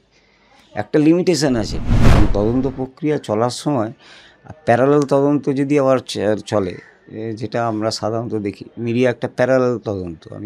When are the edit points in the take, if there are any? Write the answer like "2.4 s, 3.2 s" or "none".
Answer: 2.0 s

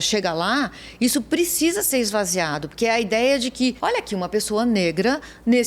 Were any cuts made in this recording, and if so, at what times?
3.8 s

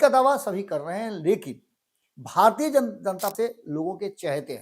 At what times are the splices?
3.3 s

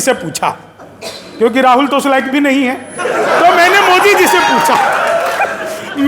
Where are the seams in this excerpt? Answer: none

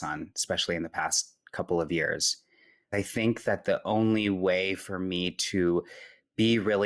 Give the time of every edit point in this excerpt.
2.9 s

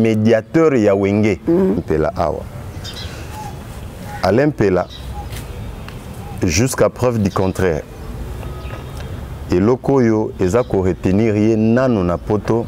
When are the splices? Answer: 1.8 s

